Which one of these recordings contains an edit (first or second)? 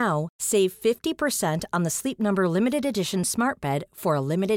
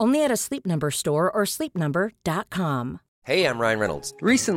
second